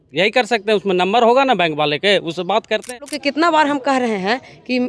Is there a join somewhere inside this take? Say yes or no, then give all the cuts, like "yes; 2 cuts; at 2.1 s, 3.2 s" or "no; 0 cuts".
yes; 1 cut; at 2.9 s